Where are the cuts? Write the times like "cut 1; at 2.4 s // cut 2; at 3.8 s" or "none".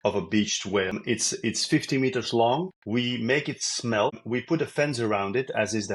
cut 1; at 1.0 s // cut 2; at 2.8 s // cut 3; at 4.2 s